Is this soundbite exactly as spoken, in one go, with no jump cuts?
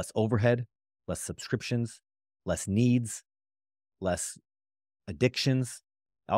yes; 0 cuts

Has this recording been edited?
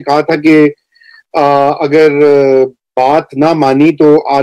no; 0 cuts

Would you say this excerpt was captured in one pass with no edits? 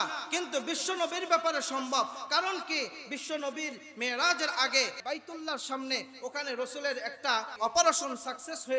no; 2 cuts; at 5.0 s, 7.6 s

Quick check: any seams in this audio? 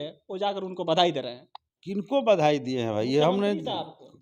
no; 0 cuts

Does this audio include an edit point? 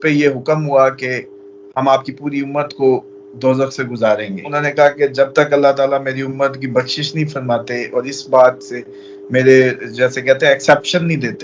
yes; 1 cut; at 4.4 s

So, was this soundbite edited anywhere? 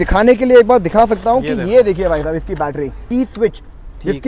yes; 1 cut; at 3.0 s

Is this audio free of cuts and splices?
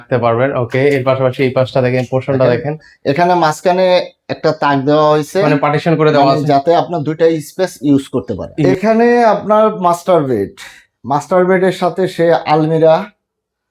no; 1 cut; at 8.4 s

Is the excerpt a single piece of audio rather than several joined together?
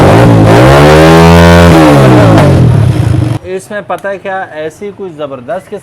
no; 1 cut; at 3.4 s

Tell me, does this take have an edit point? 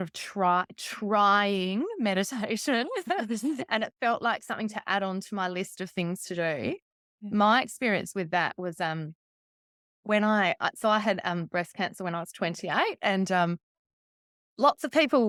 no; 0 cuts

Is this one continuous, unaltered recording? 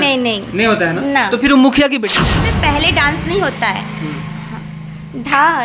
no; 1 cut; at 2.5 s

